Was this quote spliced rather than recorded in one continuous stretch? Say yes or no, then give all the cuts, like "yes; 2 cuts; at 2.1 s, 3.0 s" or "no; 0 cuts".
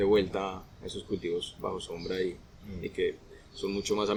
no; 0 cuts